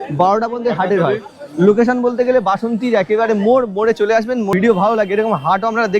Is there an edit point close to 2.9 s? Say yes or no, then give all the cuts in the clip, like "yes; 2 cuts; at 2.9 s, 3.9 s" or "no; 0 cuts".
no; 1 cut; at 4.5 s